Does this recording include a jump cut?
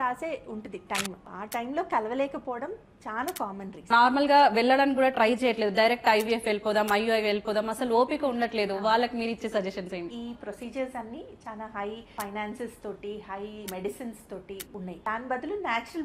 yes; 6 cuts; at 1.3 s, 3.9 s, 10.1 s, 12.1 s, 13.7 s, 14.9 s

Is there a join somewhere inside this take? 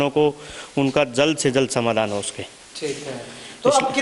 no; 0 cuts

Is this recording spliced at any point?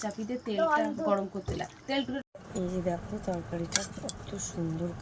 yes; 1 cut; at 2.2 s

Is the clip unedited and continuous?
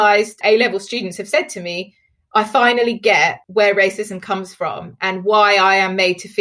yes; 0 cuts

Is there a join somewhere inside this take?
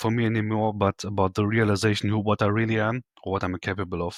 no; 0 cuts

